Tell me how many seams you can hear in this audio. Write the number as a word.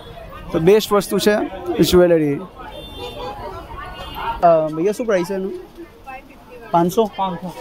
one